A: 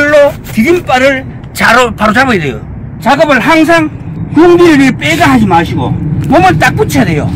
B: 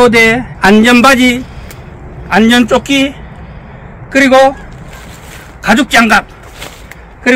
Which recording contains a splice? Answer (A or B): A